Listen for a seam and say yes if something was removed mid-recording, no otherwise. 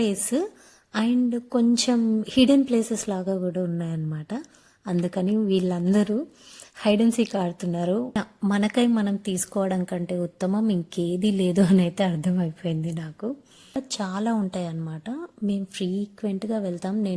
yes